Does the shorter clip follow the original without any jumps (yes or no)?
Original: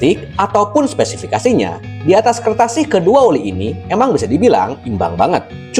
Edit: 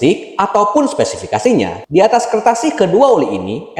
no